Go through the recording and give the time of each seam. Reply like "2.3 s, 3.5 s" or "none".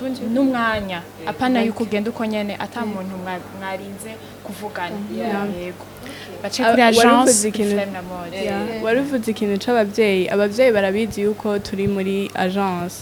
none